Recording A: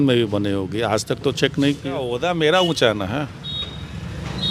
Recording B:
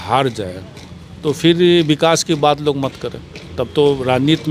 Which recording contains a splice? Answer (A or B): A